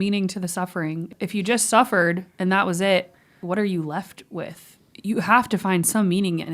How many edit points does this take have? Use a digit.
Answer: 2